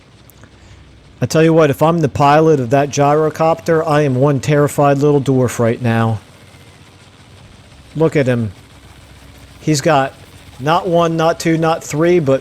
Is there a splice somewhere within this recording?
yes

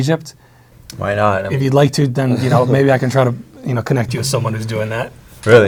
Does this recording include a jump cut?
no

